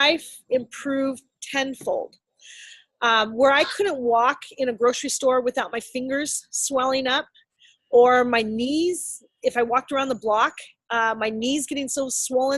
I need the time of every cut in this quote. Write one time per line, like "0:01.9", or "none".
none